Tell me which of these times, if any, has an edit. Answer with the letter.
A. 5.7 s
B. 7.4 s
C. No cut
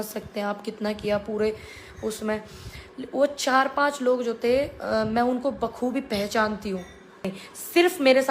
B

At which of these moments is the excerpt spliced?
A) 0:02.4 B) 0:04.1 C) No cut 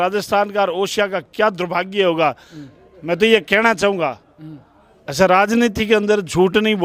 C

